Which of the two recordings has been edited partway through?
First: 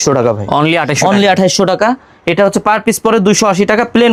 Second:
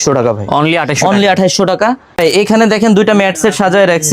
second; 1 cut; at 2.1 s

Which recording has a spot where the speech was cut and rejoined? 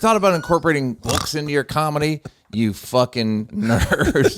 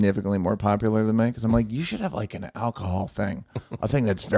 first; 2 cuts; at 1.0 s, 3.5 s

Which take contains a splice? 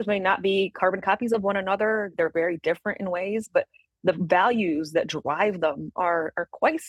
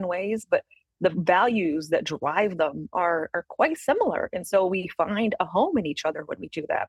first; 1 cut; at 2.1 s

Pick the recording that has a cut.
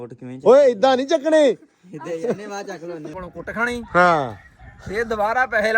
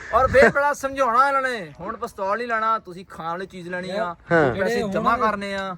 first; 1 cut; at 3.2 s

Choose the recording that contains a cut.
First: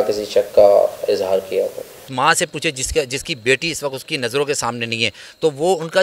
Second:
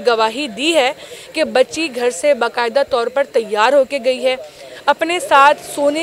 first; 1 cut; at 2.0 s

